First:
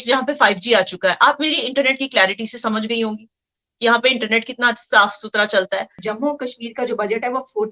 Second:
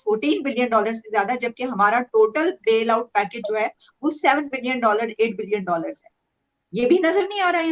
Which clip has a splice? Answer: first; 1 cut; at 6.0 s

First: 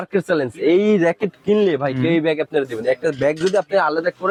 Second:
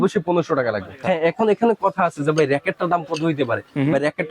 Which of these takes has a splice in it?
second; 1 cut; at 1.0 s

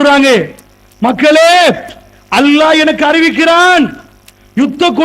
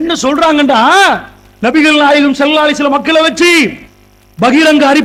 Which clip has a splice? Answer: first; 1 cut; at 2.8 s

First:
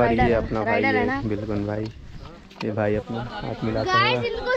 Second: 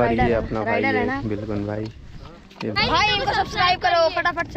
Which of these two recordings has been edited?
second; 1 cut; at 2.8 s

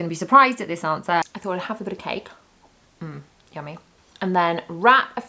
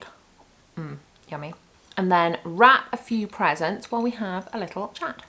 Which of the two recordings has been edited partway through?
first; 1 cut; at 1.3 s

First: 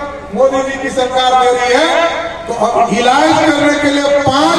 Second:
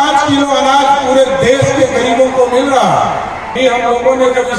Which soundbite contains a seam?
second; 1 cut; at 3.4 s

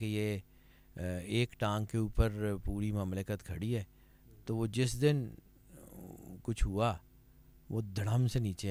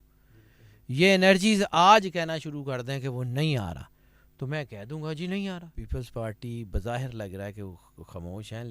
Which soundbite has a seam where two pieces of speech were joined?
second; 1 cut; at 5.8 s

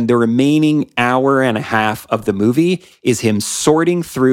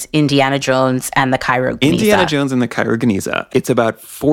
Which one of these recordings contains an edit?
second; 1 cut; at 3.4 s

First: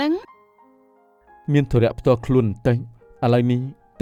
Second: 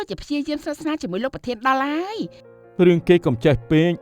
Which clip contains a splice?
second; 1 cut; at 2.4 s

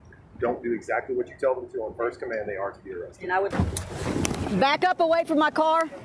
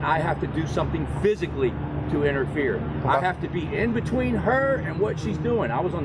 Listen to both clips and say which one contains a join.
first; 1 cut; at 3.5 s

